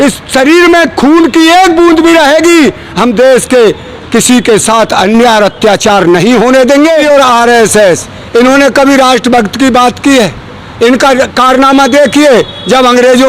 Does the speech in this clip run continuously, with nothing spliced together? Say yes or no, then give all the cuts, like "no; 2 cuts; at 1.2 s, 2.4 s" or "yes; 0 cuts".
no; 1 cut; at 7.0 s